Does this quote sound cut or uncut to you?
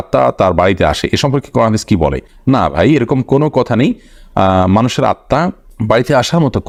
uncut